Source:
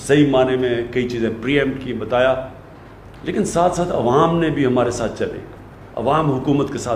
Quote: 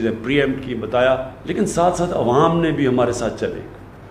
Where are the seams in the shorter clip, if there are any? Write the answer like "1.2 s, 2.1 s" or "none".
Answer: 1.4 s